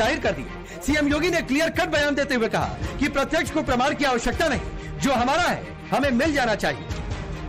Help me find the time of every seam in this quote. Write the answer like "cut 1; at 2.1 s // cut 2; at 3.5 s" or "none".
cut 1; at 5.1 s